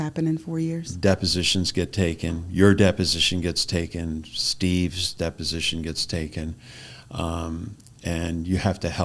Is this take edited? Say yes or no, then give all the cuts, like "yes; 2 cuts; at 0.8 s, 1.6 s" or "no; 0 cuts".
no; 0 cuts